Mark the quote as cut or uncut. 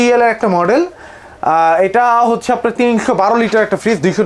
uncut